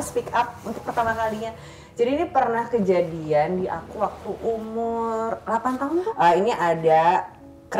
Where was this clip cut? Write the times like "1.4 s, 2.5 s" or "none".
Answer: 6.0 s